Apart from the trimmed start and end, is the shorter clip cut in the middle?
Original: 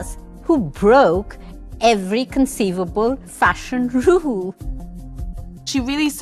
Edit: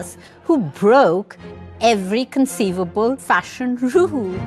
yes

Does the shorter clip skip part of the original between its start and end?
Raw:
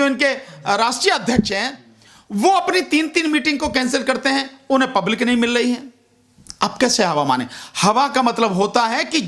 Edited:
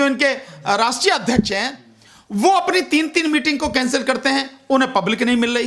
no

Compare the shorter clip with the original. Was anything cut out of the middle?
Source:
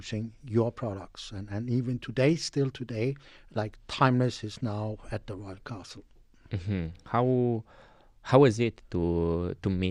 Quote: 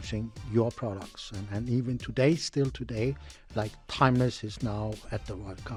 no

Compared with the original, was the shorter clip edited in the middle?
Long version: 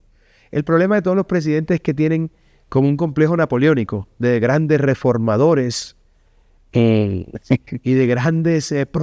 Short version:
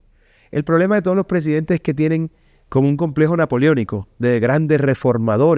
no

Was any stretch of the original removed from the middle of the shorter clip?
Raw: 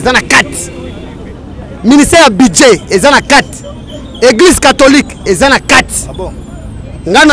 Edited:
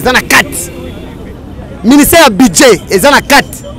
no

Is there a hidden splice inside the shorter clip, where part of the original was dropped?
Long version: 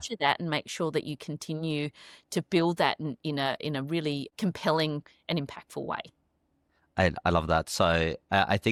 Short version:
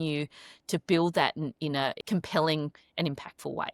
yes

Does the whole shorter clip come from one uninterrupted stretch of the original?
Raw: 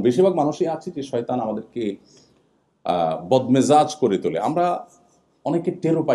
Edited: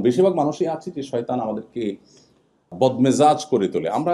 no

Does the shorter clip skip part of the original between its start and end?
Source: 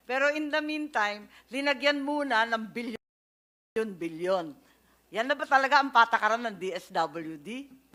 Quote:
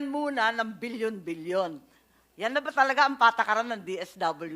yes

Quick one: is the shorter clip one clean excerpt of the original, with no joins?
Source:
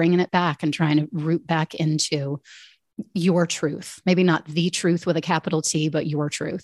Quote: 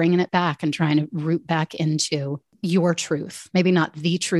no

